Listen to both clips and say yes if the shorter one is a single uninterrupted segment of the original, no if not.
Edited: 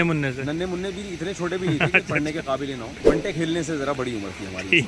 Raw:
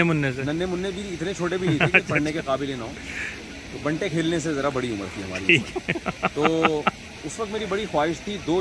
no